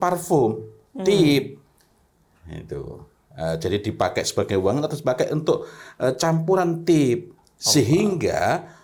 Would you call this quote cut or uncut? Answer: uncut